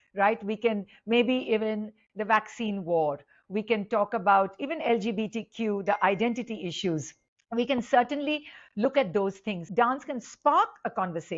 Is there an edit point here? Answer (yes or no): yes